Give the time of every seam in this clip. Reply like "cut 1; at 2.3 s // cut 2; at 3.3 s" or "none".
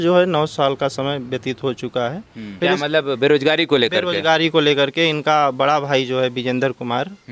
cut 1; at 2.4 s